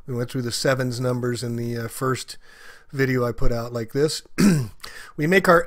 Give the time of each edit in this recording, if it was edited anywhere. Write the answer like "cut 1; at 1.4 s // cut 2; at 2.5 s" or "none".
cut 1; at 3.0 s